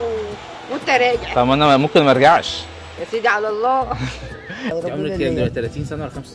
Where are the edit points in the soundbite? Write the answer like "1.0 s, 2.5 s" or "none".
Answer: 4.7 s